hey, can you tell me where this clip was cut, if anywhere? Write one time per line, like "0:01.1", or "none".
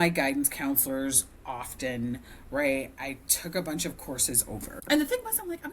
0:04.7